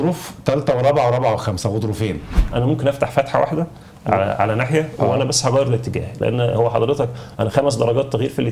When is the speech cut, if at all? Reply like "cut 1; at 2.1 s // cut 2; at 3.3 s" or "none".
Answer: cut 1; at 2.3 s